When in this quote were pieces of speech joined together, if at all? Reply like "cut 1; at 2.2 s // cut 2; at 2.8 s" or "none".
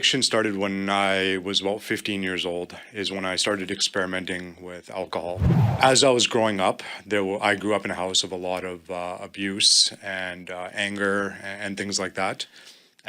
cut 1; at 5.5 s

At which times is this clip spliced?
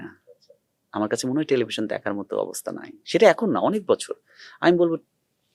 none

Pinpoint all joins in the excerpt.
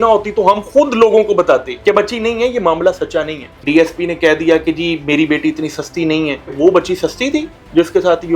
cut 1; at 3.6 s // cut 2; at 6.5 s

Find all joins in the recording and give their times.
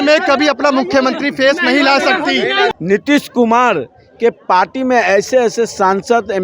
cut 1; at 2.7 s

